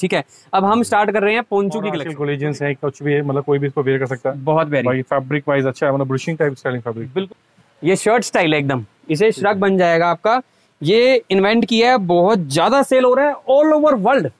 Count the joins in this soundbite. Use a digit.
2